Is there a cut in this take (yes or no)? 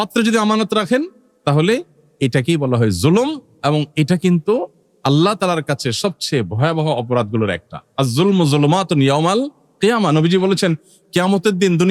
no